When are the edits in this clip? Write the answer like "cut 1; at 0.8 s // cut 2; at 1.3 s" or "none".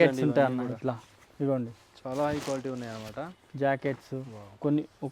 none